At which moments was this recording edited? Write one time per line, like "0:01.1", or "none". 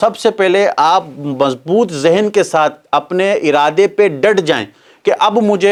none